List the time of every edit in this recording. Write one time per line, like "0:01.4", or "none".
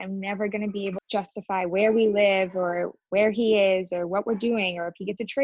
0:01.0